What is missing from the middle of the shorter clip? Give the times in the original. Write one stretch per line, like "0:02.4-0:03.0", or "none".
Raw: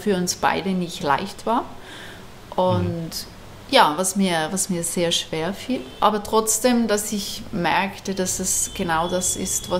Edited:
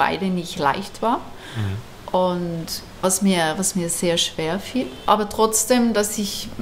0:03.4-0:03.9